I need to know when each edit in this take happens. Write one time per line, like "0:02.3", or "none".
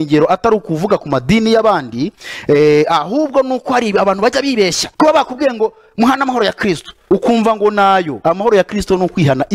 0:04.8
0:06.9
0:08.1